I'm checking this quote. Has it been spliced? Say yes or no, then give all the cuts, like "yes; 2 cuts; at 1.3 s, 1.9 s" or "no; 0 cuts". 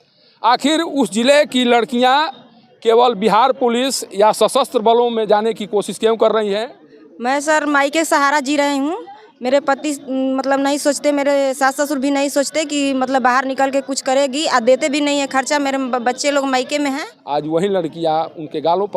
yes; 2 cuts; at 6.8 s, 17.1 s